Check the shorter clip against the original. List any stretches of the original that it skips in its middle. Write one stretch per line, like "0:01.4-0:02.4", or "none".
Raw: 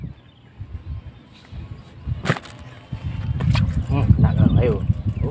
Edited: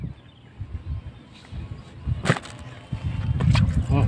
none